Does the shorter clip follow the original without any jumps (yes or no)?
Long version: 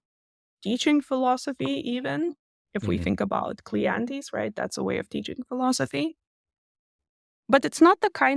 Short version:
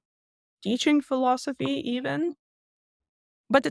no